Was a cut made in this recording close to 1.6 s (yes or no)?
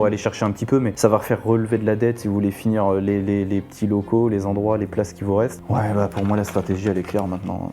no